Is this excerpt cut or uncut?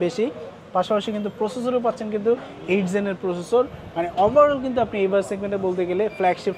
uncut